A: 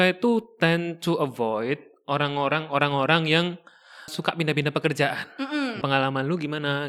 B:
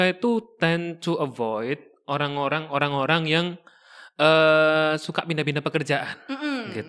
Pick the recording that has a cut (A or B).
A